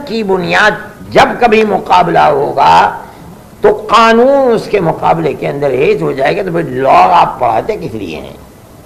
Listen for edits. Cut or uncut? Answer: uncut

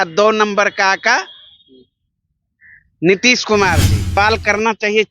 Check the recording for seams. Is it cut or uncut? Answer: cut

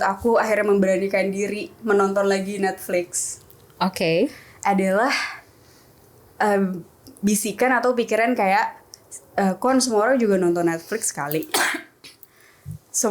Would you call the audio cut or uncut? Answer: uncut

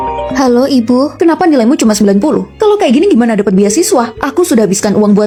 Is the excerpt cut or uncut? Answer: uncut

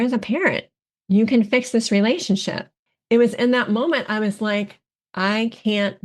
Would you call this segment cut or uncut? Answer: cut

